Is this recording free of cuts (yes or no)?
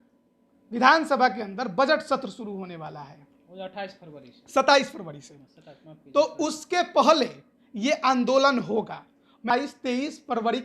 no